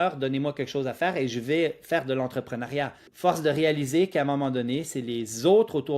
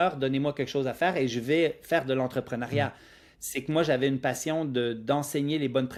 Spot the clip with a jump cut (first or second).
first